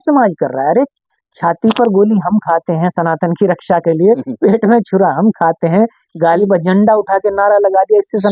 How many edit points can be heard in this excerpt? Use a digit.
1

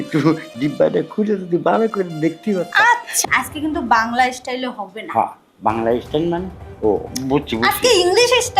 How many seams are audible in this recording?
1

